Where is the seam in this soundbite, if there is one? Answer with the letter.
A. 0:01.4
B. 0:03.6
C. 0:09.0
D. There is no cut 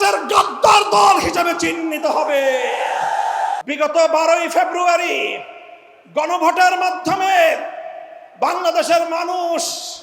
B